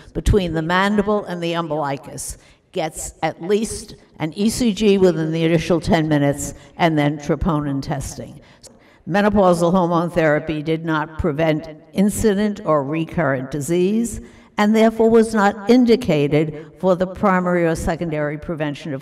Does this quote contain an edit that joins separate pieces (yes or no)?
yes